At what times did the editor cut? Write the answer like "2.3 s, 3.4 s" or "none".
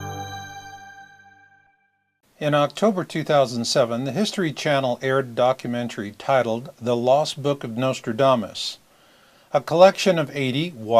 none